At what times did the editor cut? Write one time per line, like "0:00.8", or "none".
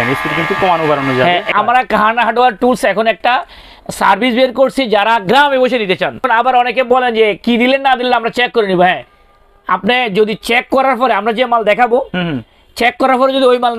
0:01.5
0:06.2